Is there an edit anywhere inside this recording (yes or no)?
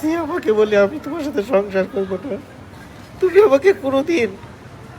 no